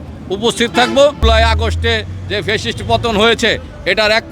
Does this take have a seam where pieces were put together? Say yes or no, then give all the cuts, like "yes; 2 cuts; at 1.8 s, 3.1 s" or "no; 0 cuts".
yes; 1 cut; at 1.2 s